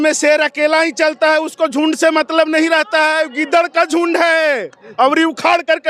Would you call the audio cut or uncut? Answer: uncut